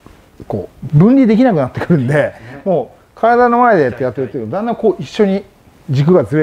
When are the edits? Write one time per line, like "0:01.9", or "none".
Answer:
none